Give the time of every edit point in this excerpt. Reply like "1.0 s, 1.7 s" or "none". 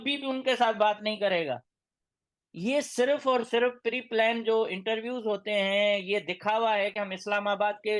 none